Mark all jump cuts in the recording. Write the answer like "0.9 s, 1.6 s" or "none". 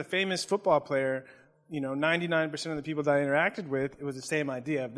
3.9 s